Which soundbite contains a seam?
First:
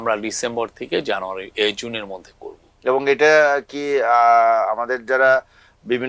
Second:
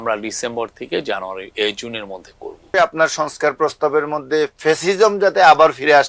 second; 1 cut; at 2.7 s

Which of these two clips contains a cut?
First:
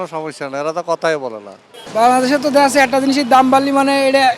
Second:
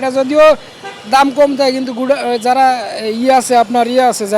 first; 1 cut; at 1.6 s

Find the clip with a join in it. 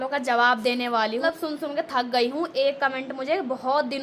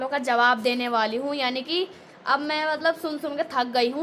first; 1 cut; at 1.2 s

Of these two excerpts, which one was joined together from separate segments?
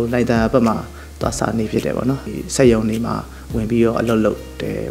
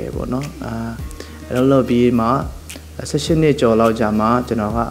first; 1 cut; at 2.3 s

